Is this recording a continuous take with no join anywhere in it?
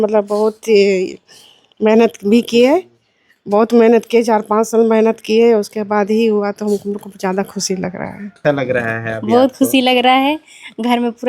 no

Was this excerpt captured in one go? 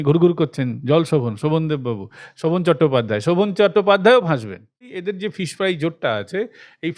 no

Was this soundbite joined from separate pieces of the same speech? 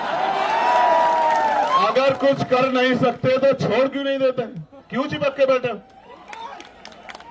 no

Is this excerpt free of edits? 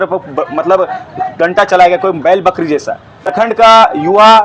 no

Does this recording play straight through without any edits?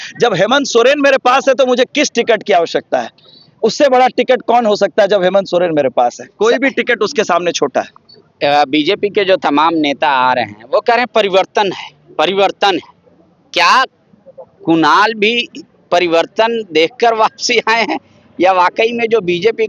yes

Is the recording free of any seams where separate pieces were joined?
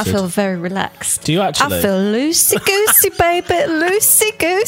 yes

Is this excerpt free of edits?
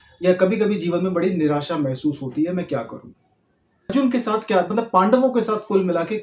no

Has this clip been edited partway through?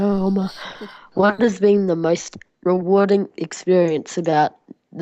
no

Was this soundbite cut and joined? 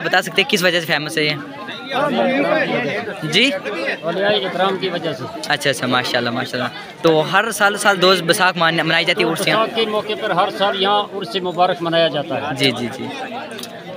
no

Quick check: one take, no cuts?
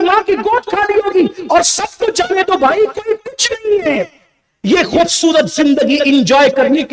yes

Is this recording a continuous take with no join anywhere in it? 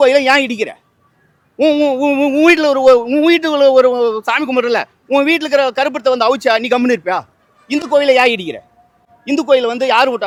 yes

